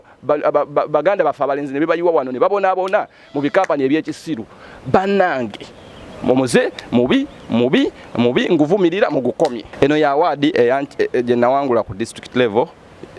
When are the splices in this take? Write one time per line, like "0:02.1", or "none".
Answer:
0:09.6